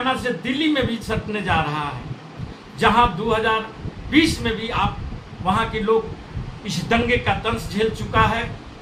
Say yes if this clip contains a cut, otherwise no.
no